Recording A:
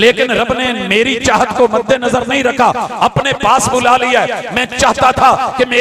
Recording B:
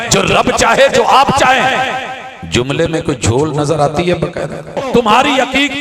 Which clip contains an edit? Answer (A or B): B